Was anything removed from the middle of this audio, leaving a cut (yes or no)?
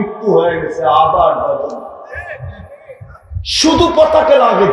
yes